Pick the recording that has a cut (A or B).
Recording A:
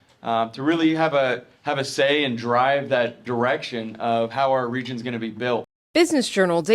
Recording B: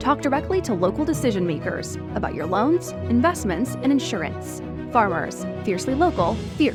A